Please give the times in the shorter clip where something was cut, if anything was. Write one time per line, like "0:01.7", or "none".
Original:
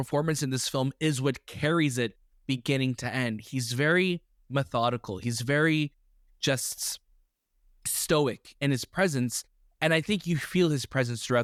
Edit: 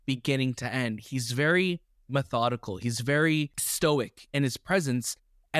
0:03.6